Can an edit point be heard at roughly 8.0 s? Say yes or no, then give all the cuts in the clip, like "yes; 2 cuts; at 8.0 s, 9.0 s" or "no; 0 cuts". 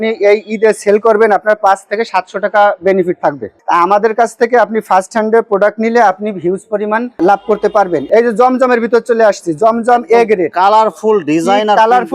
yes; 2 cuts; at 3.6 s, 8.0 s